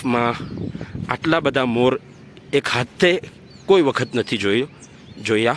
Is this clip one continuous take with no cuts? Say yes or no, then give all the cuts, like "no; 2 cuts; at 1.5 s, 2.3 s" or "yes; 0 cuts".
yes; 0 cuts